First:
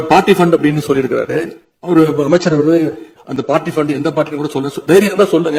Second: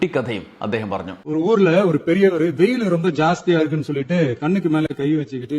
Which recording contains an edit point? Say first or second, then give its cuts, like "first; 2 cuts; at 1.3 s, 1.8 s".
second; 1 cut; at 1.2 s